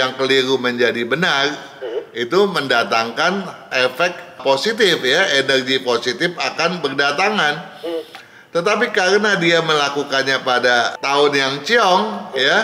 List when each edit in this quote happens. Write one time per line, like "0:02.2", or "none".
none